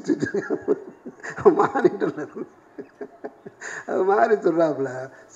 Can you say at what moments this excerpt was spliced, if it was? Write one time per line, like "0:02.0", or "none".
none